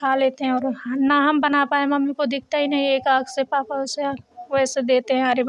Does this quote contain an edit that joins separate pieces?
no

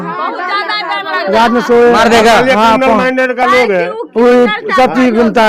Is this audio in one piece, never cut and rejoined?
yes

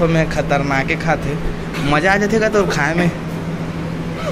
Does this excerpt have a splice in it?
no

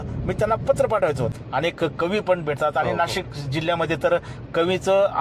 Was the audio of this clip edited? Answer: yes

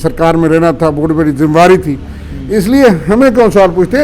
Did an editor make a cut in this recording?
no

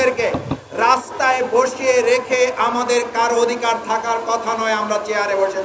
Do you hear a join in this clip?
no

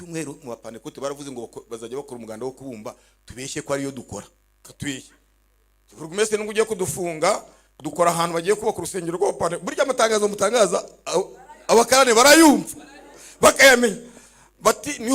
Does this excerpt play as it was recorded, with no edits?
no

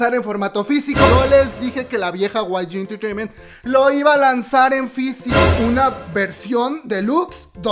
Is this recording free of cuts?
no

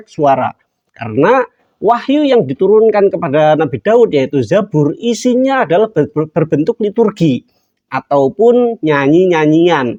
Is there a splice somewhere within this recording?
no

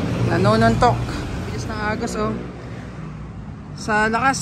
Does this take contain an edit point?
yes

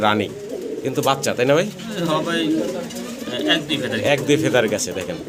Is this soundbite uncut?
yes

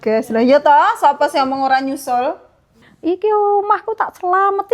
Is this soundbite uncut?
no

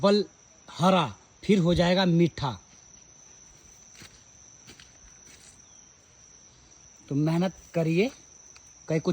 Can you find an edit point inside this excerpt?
no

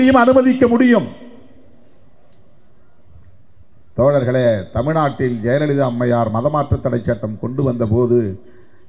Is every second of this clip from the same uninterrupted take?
yes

